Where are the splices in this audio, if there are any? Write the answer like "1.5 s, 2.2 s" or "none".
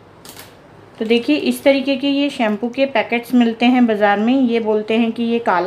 none